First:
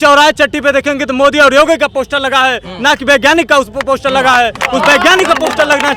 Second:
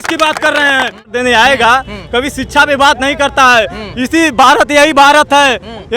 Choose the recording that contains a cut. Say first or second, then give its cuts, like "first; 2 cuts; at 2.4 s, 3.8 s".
second; 1 cut; at 1.1 s